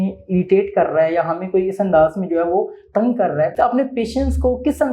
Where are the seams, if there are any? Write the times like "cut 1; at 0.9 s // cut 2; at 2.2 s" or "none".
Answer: cut 1; at 3.5 s